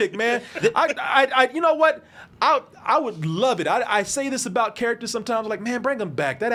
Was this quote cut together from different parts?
no; 0 cuts

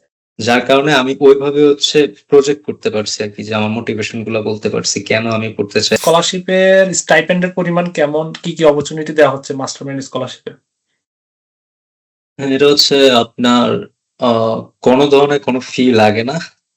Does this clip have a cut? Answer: yes; 1 cut; at 6.0 s

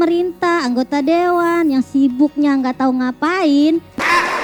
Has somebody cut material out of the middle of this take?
no; 0 cuts

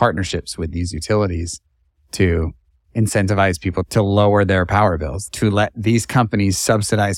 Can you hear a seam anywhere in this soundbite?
yes; 2 cuts; at 3.9 s, 5.1 s

